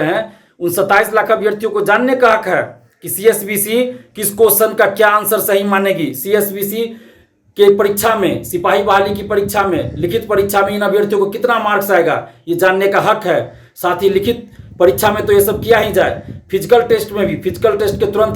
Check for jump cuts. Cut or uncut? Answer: uncut